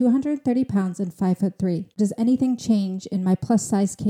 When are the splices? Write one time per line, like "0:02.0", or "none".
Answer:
0:02.0